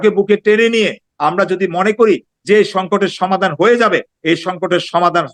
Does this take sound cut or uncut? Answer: uncut